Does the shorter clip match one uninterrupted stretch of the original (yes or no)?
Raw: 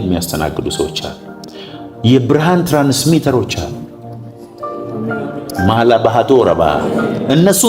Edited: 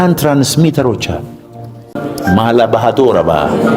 no